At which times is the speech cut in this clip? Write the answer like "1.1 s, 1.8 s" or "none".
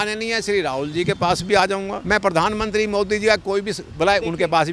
1.9 s